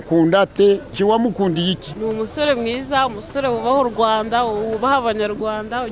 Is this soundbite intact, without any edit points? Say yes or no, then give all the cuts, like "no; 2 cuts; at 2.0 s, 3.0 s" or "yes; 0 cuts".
no; 2 cuts; at 0.9 s, 1.9 s